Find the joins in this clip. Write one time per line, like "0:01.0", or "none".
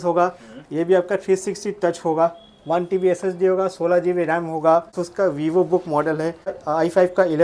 0:05.0
0:06.6